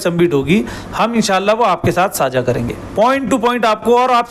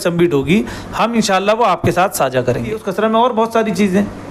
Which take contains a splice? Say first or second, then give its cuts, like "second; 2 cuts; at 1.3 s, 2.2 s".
second; 1 cut; at 2.8 s